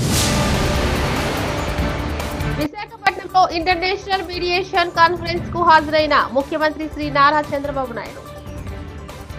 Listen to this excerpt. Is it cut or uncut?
uncut